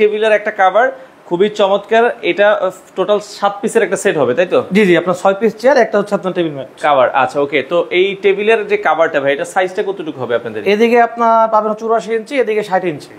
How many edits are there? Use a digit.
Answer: 0